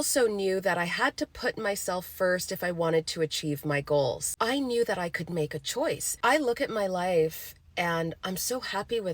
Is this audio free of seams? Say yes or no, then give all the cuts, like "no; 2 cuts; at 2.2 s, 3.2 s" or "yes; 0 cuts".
no; 2 cuts; at 4.3 s, 6.1 s